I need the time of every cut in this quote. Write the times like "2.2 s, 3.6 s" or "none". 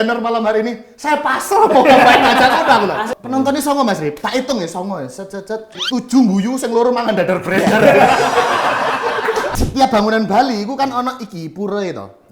3.1 s, 5.8 s, 9.5 s